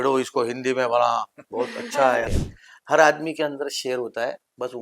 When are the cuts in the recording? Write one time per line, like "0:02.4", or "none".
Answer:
0:02.3